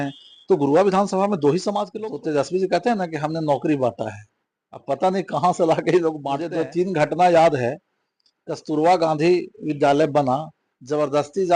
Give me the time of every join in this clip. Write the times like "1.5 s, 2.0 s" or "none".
1.9 s, 6.3 s